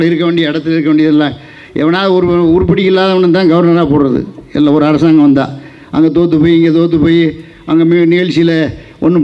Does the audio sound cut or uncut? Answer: uncut